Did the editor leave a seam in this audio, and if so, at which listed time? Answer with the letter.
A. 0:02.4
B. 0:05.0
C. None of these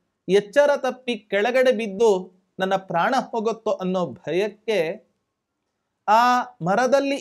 C